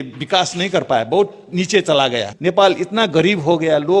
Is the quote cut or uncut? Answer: cut